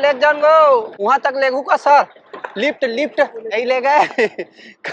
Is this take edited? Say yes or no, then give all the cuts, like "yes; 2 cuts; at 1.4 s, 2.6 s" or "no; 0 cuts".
yes; 2 cuts; at 0.9 s, 3.5 s